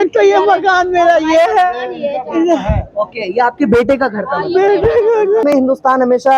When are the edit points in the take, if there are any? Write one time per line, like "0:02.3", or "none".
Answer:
0:05.4